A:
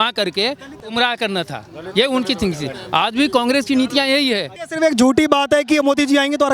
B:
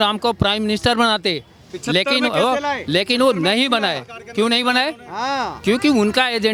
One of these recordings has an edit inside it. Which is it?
A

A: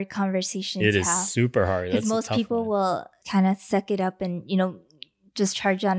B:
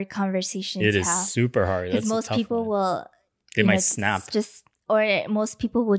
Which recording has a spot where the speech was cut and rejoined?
A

